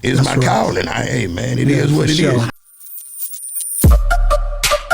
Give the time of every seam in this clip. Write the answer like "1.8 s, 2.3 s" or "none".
2.5 s